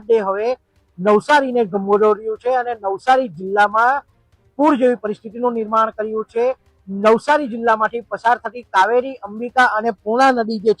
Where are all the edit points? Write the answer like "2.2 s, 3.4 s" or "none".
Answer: none